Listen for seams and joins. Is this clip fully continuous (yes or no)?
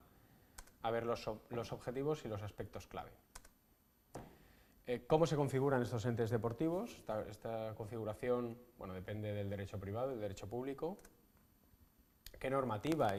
yes